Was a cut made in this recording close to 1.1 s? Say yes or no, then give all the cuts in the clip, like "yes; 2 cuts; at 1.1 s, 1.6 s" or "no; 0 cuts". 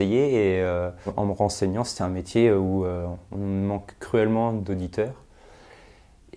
yes; 1 cut; at 1.1 s